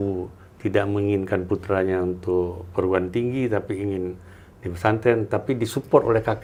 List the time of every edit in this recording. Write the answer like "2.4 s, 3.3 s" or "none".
none